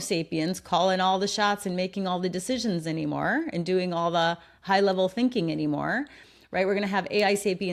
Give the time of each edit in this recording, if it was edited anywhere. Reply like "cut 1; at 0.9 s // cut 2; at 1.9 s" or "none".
none